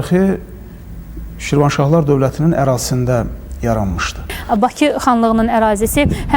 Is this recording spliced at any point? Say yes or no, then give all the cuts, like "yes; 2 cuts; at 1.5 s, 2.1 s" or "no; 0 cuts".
yes; 1 cut; at 4.4 s